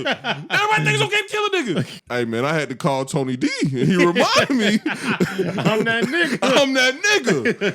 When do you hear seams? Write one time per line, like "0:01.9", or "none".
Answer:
0:01.9